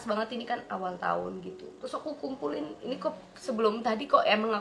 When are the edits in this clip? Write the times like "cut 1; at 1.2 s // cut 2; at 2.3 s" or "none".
cut 1; at 1.8 s